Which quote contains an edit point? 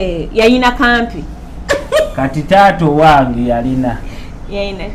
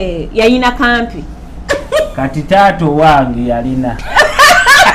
second; 1 cut; at 4.0 s

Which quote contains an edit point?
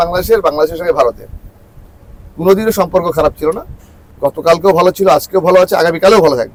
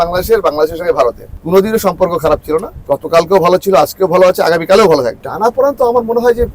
second; 3 cuts; at 1.3 s, 2.7 s, 5.2 s

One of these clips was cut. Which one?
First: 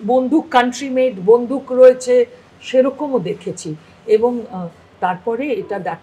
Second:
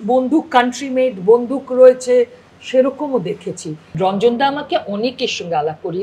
second; 1 cut; at 3.9 s

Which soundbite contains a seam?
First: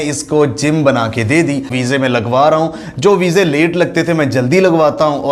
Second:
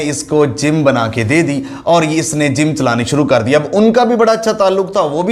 first; 1 cut; at 1.7 s

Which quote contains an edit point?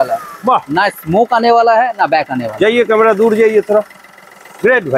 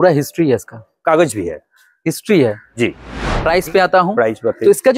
second; 1 cut; at 3.0 s

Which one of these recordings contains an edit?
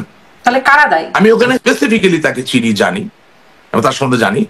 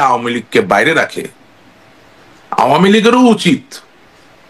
first; 1 cut; at 1.6 s

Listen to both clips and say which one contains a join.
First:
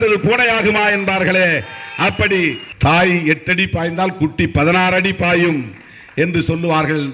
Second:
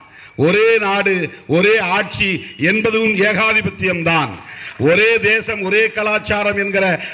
first; 1 cut; at 2.7 s

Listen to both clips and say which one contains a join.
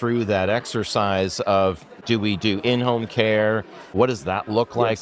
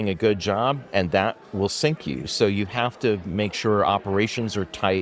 first; 2 cuts; at 1.9 s, 4.0 s

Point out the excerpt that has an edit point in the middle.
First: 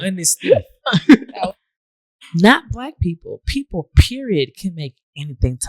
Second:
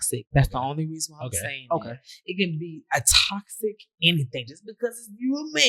first; 1 cut; at 1.3 s

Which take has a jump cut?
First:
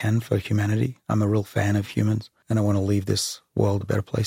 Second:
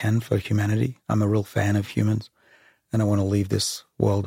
first; 1 cut; at 2.3 s

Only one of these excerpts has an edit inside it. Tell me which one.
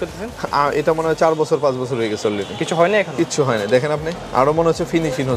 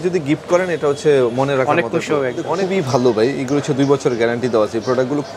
second; 1 cut; at 2.6 s

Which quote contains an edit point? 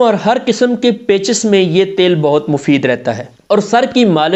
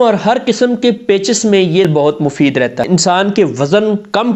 second; 2 cuts; at 1.9 s, 2.8 s

